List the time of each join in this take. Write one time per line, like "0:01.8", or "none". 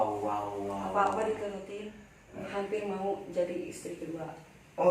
0:02.5